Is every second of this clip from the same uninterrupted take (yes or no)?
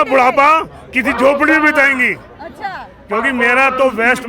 yes